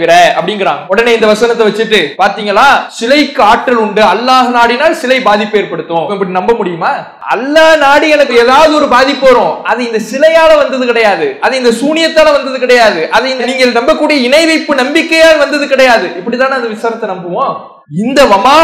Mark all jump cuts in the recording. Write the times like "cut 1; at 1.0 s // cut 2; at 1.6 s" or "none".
cut 1; at 0.8 s // cut 2; at 2.1 s // cut 3; at 2.9 s // cut 4; at 6.1 s // cut 5; at 7.1 s // cut 6; at 17.7 s